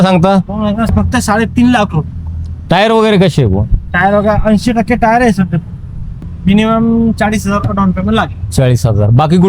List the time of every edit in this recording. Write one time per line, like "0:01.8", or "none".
0:00.9
0:06.3